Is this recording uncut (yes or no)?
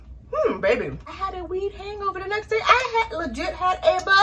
no